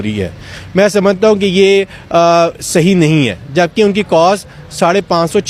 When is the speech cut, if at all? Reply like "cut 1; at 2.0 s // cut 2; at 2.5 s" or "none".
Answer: none